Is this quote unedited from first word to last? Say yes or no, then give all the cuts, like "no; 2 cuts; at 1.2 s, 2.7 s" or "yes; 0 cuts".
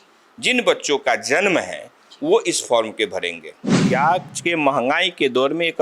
no; 1 cut; at 3.8 s